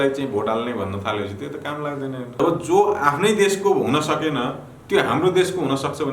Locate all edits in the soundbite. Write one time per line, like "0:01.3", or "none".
0:02.4